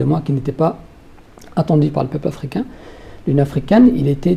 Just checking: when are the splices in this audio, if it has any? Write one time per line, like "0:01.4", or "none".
none